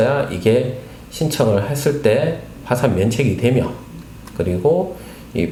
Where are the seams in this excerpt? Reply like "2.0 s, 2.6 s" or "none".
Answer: none